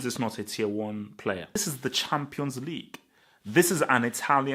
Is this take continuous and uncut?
no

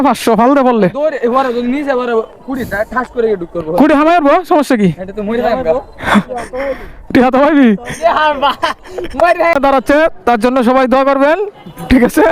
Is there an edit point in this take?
yes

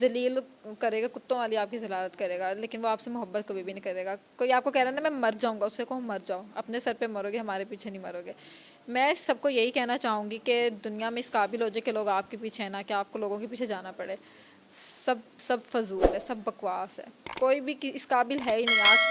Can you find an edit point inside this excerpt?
no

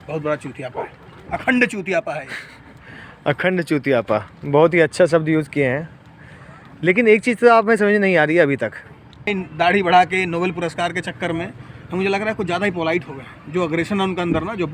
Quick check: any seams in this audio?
yes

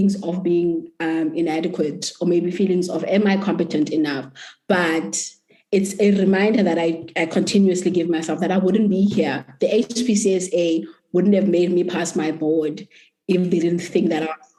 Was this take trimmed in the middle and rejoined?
no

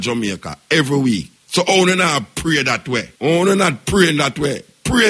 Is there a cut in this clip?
yes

